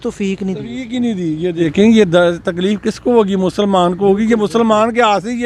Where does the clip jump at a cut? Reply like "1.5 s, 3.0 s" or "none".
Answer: 1.6 s

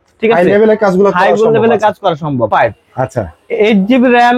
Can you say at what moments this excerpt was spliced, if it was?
2.5 s

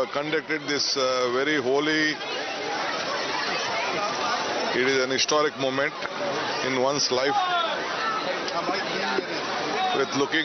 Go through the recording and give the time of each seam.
1.1 s

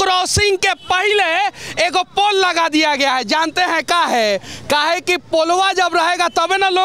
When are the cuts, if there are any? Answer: none

